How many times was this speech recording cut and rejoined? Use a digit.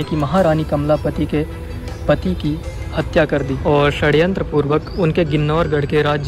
0